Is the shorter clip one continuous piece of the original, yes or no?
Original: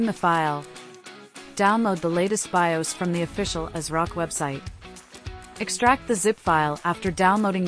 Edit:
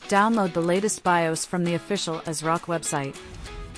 yes